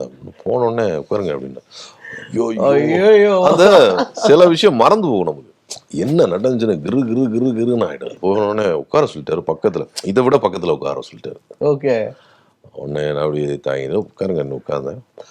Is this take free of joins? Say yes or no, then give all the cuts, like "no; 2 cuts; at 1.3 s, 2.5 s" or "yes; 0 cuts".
no; 1 cut; at 8.2 s